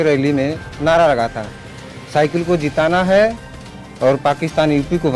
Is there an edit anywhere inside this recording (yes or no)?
no